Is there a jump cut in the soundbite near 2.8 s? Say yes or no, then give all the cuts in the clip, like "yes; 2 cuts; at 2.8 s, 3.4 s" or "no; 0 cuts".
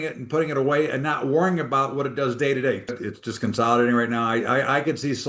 yes; 1 cut; at 2.8 s